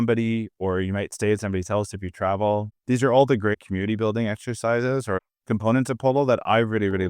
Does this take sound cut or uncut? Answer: cut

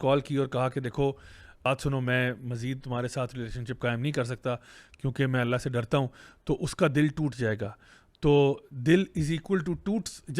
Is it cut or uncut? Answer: cut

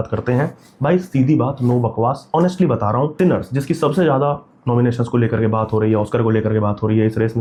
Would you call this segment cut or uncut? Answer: uncut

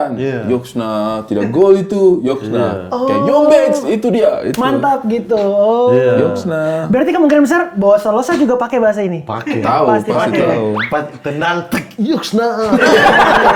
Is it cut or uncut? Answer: uncut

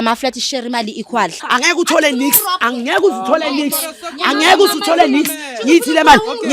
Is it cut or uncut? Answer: cut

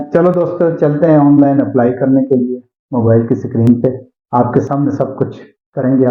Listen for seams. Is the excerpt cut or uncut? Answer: uncut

